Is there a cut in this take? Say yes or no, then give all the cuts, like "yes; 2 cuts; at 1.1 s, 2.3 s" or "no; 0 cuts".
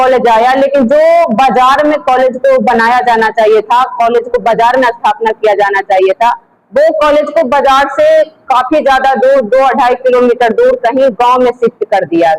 no; 0 cuts